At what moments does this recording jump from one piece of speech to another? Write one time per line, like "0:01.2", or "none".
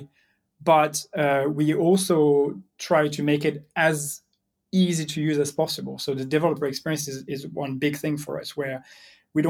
none